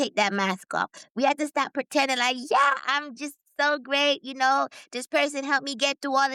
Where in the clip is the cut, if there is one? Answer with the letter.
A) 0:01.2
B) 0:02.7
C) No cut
C